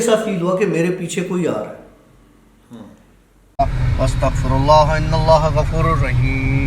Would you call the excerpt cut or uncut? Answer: cut